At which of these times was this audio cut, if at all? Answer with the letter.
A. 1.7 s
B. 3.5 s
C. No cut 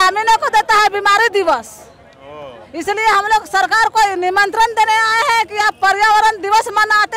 C